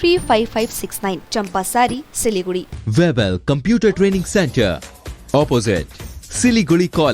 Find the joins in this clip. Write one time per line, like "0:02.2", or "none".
0:02.8